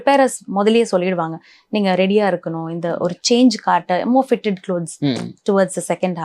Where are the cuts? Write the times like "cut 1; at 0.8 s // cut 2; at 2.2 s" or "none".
none